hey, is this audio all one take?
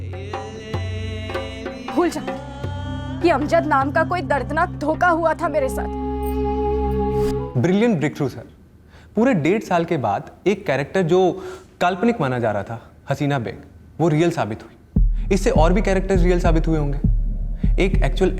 no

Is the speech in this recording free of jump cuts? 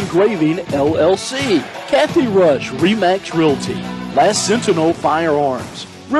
no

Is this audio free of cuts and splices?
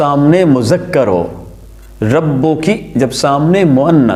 yes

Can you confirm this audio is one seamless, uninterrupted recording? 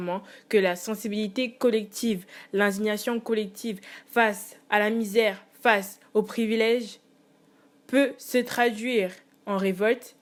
yes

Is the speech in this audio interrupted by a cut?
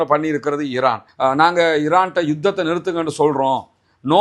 yes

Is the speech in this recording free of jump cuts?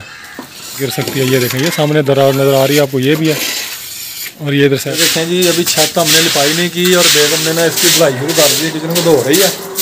no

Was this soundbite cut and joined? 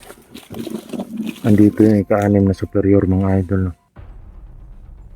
yes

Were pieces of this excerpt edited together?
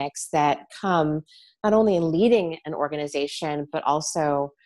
no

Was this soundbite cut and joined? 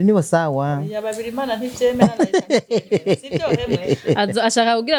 no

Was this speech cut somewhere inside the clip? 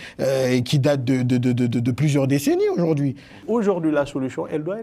yes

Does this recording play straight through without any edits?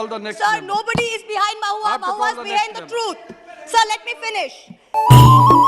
no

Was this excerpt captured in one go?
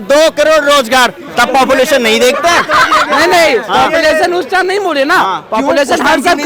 yes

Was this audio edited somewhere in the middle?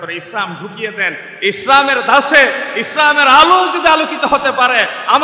no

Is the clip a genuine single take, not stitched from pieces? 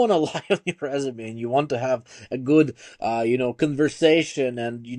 yes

